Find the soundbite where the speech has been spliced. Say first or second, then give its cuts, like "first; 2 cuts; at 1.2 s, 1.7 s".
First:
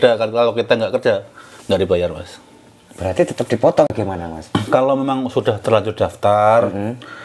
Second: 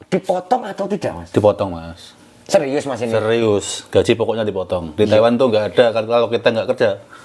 first; 1 cut; at 3.9 s